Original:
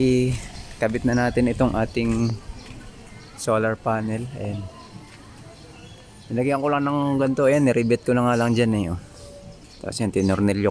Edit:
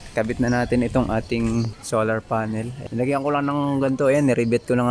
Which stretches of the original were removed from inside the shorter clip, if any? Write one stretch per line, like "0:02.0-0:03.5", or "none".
0:02.4-0:03.3
0:04.3-0:06.2